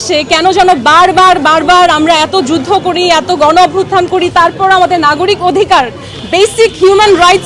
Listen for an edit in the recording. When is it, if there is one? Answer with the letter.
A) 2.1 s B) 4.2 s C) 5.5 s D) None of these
D